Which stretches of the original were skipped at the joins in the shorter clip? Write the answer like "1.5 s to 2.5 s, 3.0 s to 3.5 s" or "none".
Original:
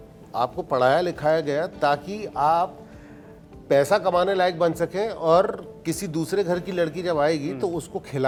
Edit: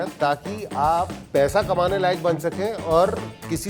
2.8 s to 3.5 s